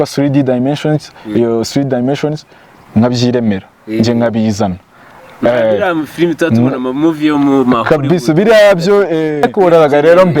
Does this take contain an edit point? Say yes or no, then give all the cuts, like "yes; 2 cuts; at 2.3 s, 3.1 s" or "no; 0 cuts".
yes; 1 cut; at 9.5 s